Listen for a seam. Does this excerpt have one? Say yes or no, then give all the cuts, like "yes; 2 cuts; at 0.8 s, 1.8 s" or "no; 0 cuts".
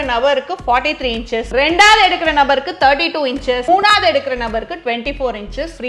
yes; 2 cuts; at 1.5 s, 3.6 s